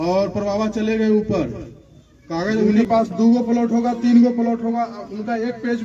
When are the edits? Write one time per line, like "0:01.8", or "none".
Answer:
0:02.8